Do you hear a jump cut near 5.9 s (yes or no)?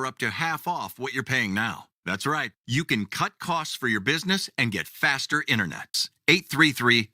yes